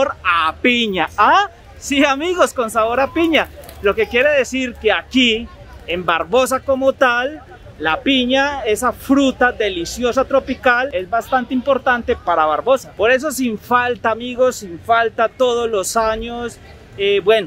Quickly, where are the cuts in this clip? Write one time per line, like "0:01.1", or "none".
none